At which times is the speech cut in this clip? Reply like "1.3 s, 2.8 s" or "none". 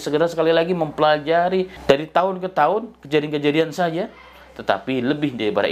1.7 s